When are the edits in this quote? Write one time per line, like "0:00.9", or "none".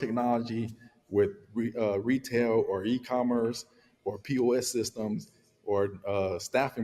none